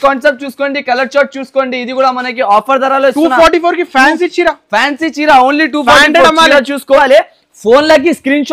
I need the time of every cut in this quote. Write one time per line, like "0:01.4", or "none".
0:07.0